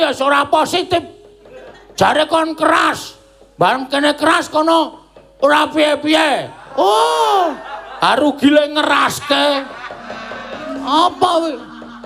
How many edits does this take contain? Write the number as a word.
zero